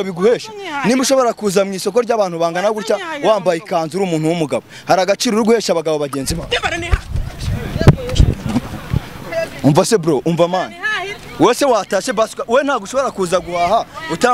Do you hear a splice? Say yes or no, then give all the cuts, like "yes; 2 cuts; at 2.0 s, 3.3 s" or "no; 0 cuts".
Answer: no; 0 cuts